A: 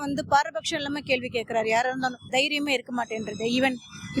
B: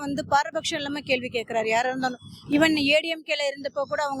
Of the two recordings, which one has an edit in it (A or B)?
A